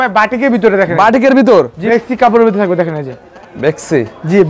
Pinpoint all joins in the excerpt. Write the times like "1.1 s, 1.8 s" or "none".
1.9 s